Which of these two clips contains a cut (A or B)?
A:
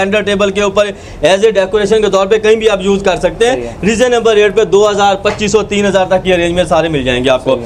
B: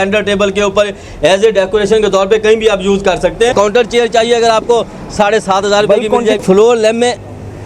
B